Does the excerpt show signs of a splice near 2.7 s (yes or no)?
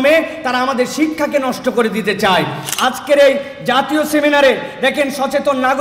yes